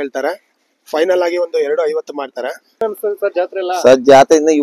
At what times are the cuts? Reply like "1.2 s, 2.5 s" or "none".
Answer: 2.8 s